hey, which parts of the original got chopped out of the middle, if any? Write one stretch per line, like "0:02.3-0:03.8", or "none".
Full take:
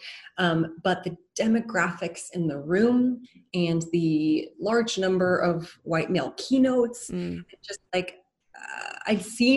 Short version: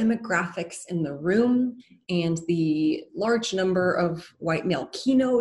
none